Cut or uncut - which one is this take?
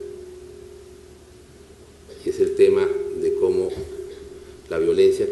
cut